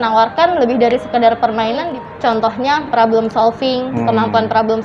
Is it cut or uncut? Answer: cut